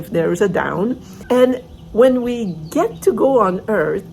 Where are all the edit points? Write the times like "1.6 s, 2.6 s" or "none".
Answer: 1.2 s